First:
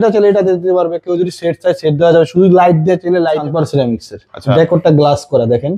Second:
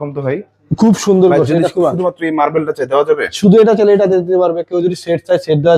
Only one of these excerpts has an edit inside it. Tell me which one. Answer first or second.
first